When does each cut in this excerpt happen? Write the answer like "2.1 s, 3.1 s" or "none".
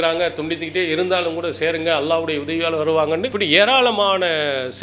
3.3 s